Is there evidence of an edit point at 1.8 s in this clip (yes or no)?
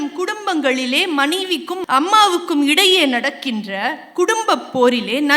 yes